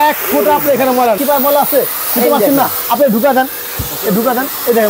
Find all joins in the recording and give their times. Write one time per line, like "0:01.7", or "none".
0:01.2